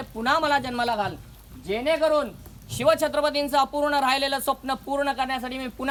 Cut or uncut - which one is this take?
uncut